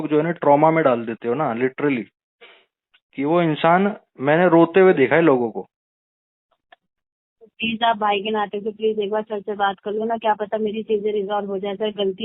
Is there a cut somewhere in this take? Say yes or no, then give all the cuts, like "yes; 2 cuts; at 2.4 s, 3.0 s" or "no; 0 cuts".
no; 0 cuts